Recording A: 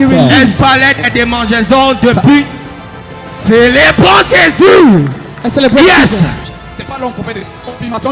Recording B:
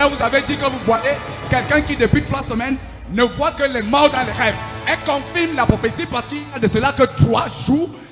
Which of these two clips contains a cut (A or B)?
A